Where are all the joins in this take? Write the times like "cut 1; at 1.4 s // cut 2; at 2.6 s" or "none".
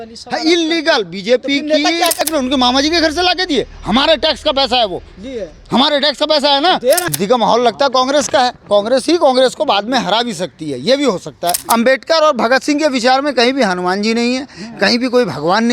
cut 1; at 2.2 s // cut 2; at 7.1 s // cut 3; at 11.6 s